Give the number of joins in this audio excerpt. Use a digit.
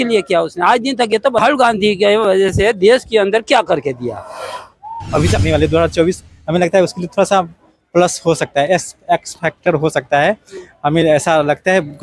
1